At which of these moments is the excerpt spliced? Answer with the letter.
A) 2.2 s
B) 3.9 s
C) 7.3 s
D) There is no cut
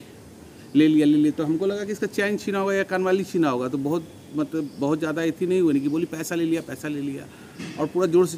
D